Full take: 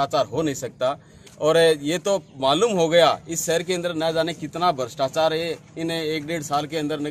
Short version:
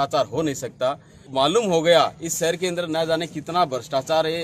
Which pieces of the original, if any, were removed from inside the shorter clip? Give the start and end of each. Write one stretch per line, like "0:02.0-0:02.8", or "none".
0:01.2-0:02.3